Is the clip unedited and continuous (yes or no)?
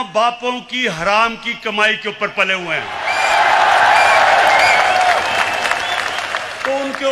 yes